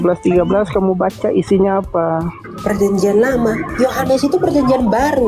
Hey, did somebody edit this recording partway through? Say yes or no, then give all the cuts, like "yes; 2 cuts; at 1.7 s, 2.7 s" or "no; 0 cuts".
no; 0 cuts